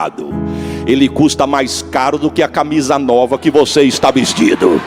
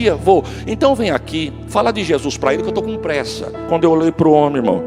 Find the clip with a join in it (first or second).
second